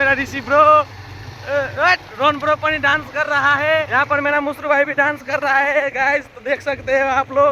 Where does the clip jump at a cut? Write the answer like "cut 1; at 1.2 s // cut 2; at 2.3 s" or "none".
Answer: cut 1; at 3.9 s

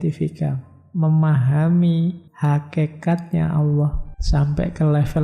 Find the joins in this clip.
cut 1; at 2.3 s // cut 2; at 4.1 s

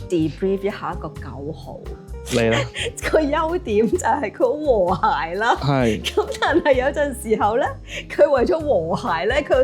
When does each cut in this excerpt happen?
cut 1; at 2.1 s

